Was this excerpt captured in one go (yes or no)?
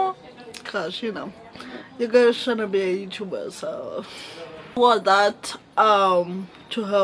no